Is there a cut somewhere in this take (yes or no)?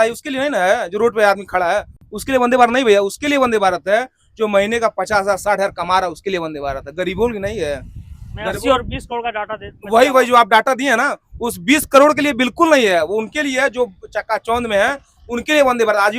no